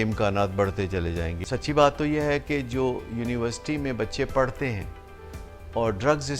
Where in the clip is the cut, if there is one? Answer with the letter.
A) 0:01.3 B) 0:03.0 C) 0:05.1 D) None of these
A